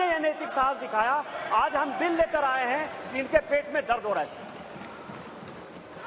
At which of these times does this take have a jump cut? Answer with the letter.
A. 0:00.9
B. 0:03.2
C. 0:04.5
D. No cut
D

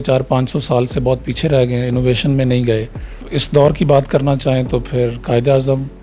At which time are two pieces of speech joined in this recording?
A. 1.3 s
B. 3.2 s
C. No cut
B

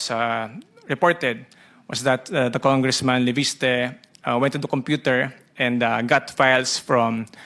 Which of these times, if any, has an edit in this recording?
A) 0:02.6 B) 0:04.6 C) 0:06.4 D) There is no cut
D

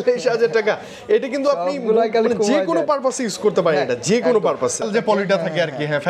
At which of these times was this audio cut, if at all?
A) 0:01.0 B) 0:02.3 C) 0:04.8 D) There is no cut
C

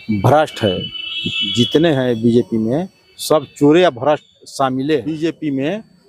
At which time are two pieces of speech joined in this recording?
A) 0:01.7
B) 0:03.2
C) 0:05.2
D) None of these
C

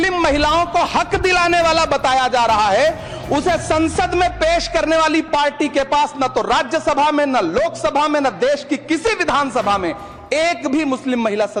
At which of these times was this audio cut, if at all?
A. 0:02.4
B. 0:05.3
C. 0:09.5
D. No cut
D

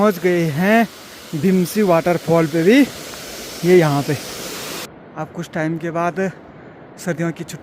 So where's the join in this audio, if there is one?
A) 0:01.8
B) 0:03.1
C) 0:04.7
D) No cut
C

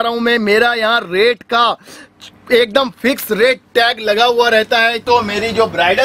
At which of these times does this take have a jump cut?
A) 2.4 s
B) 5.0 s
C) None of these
B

